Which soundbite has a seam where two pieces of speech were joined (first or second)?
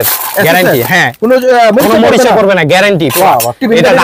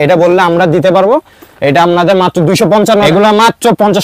second